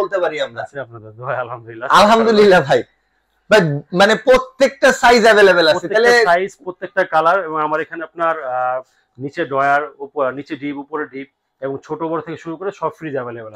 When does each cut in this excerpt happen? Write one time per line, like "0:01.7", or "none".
none